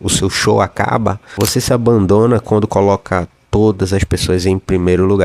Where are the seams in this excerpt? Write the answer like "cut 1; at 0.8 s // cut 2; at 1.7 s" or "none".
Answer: cut 1; at 1.2 s